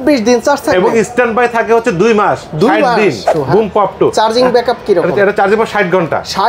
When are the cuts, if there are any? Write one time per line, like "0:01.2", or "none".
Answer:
0:03.3